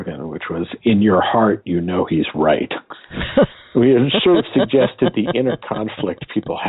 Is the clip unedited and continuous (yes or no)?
yes